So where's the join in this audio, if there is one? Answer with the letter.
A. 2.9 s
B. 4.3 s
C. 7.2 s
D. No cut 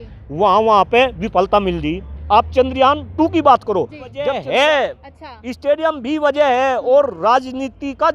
B